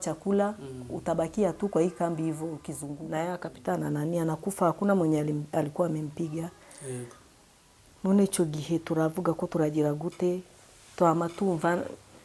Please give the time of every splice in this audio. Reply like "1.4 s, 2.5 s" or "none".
3.0 s